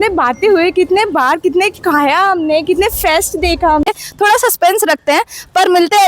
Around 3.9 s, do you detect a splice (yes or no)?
yes